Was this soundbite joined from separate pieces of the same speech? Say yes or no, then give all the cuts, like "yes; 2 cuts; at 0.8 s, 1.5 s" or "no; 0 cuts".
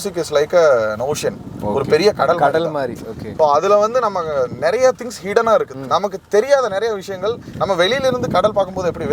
no; 0 cuts